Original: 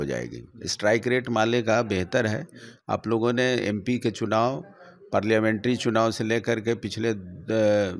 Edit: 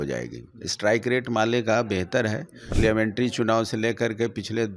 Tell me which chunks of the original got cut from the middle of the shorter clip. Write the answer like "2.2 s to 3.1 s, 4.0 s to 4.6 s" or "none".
2.8 s to 5.2 s

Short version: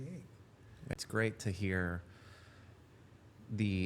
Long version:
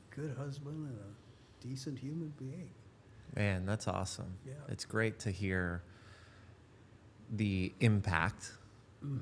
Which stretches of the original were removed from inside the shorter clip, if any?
3.4 s to 4.7 s

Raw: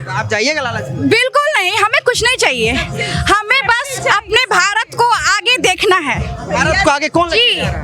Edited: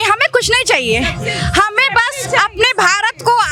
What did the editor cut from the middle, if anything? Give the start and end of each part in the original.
none

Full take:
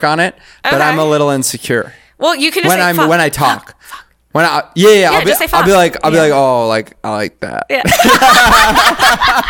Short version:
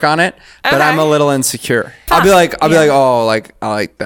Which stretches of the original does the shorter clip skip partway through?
2.0 s to 5.5 s

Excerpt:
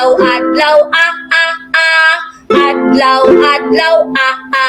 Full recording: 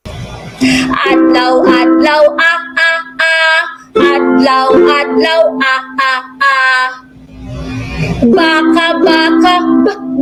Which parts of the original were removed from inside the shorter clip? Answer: none

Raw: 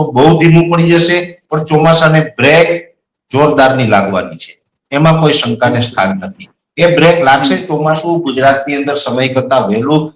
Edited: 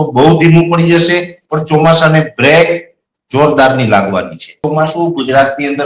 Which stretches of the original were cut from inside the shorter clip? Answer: 4.6 s to 7.7 s

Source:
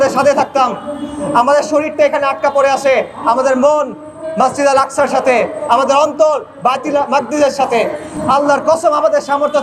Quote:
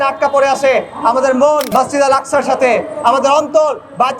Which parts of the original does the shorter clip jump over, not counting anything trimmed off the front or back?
3.9 s to 4.3 s

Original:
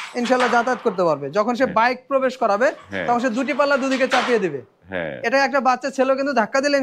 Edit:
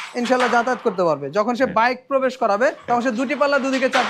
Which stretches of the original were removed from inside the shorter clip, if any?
2.8 s to 3.0 s

